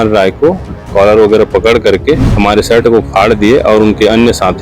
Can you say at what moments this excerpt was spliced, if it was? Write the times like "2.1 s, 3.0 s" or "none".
2.3 s